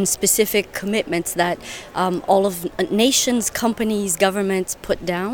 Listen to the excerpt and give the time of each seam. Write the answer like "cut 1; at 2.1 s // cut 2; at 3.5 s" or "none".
none